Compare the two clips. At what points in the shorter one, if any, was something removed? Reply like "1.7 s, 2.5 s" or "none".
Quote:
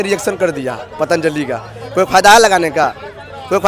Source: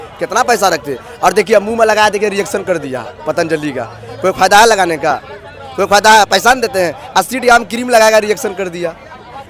none